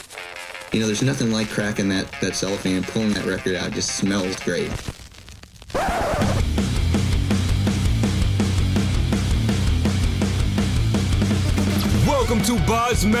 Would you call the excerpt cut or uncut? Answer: uncut